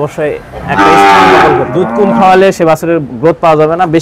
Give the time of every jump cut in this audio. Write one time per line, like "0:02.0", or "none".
0:01.8